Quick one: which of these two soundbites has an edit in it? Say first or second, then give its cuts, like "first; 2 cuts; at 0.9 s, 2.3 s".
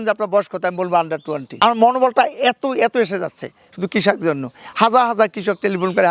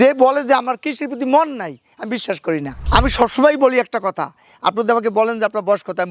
second; 1 cut; at 2.7 s